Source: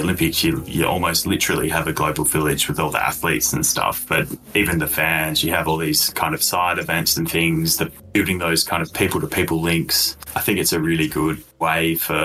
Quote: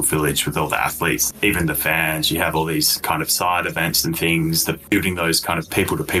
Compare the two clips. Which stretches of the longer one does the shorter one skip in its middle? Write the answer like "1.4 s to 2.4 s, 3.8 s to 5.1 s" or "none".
3.5 s to 4.4 s, 7.9 s to 8.0 s